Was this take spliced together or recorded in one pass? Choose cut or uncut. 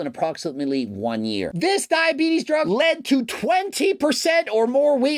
cut